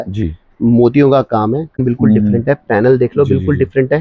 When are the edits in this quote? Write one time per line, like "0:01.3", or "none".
0:01.8